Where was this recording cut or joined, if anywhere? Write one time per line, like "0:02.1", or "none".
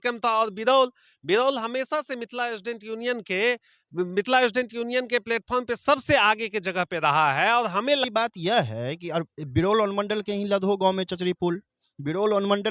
0:08.1